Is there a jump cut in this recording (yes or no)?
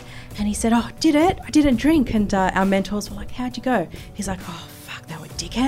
no